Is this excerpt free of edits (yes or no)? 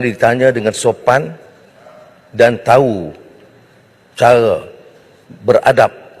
yes